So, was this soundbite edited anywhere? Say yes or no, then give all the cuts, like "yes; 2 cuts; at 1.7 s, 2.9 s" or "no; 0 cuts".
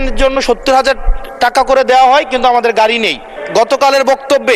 yes; 1 cut; at 3.4 s